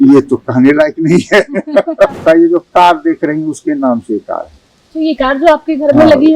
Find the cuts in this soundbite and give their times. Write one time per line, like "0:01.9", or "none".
0:02.2

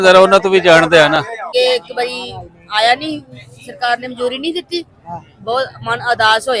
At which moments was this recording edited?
0:01.5

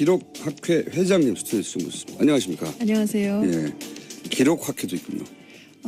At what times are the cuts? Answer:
none

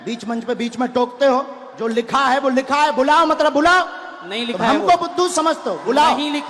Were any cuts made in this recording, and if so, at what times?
none

